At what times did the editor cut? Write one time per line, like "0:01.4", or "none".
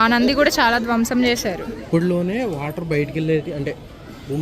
0:01.8